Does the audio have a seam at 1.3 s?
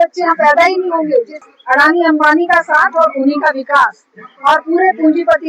yes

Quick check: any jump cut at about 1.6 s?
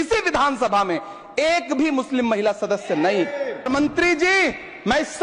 no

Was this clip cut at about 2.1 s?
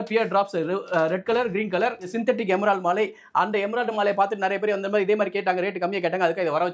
yes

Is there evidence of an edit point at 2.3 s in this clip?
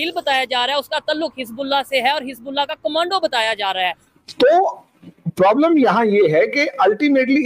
no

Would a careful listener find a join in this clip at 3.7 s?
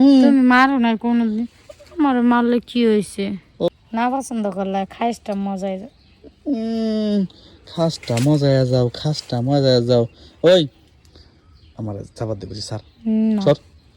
yes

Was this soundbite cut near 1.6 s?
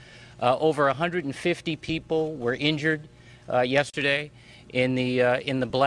no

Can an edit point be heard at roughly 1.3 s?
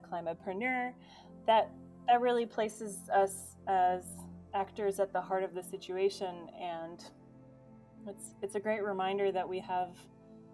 no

